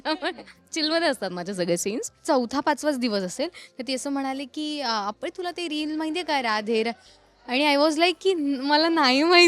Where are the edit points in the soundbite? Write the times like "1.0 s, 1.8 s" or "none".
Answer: 2.1 s